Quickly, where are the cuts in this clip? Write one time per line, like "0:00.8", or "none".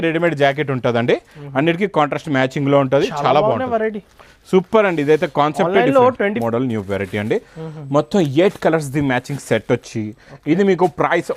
0:06.4